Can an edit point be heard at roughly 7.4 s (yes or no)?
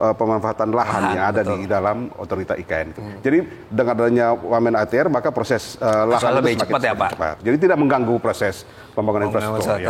yes